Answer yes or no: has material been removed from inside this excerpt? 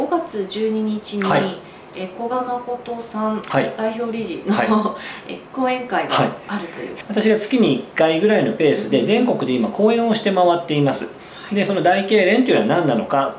yes